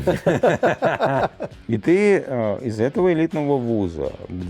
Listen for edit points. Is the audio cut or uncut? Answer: cut